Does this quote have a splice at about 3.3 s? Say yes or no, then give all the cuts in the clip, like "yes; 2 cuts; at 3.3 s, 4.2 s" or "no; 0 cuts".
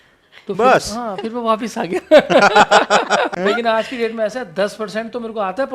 yes; 1 cut; at 3.3 s